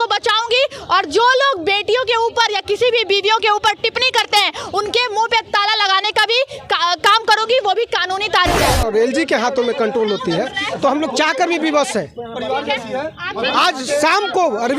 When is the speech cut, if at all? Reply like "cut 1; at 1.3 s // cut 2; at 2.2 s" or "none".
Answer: cut 1; at 8.7 s